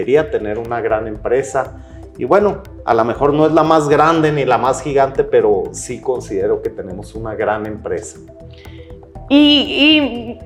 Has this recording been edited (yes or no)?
no